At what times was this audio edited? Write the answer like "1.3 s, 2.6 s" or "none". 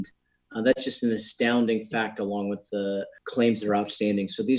3.2 s